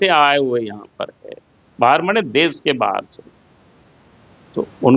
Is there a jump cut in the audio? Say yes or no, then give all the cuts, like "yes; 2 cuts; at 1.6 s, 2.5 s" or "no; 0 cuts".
no; 0 cuts